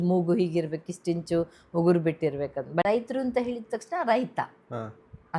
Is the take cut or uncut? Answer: cut